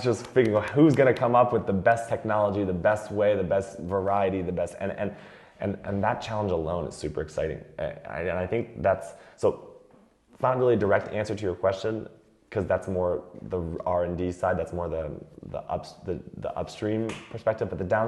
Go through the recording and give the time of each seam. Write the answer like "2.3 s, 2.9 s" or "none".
none